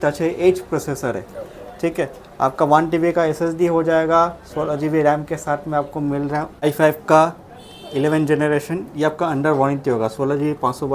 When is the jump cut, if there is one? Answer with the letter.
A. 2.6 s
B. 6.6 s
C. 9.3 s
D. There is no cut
B